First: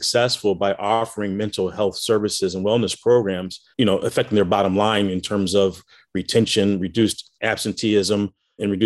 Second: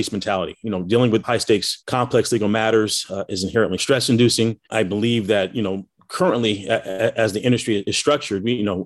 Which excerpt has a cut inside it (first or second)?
second